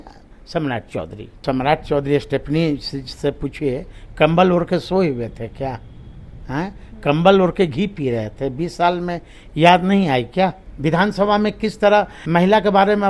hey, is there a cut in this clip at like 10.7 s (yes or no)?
yes